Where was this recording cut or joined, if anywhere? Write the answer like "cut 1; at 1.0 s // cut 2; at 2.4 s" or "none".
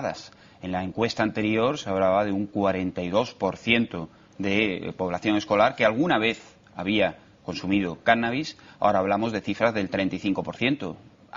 none